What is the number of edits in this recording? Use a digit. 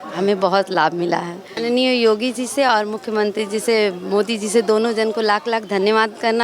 1